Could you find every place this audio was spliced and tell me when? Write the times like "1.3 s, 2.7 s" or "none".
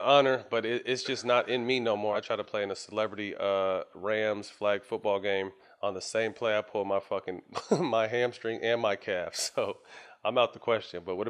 2.1 s, 5.6 s